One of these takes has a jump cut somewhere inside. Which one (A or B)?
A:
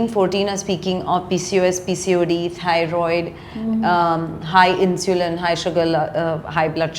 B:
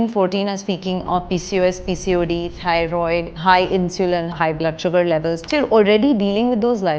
B